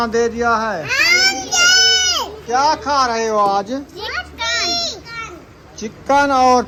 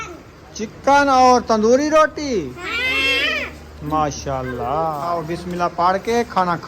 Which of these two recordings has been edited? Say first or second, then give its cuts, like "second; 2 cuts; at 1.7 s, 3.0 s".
second; 1 cut; at 5.0 s